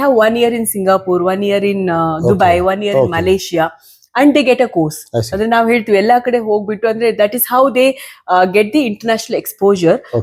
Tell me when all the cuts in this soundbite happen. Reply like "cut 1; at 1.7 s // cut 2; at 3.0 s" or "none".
none